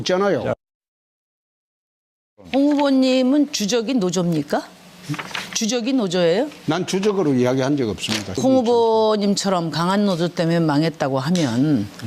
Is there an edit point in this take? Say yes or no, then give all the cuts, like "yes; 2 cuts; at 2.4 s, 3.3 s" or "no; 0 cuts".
yes; 1 cut; at 3.1 s